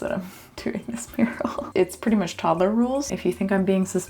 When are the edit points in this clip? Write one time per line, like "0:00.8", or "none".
0:01.6
0:03.1